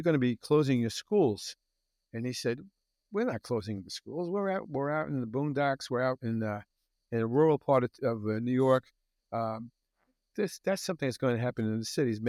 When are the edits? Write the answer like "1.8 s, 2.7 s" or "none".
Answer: none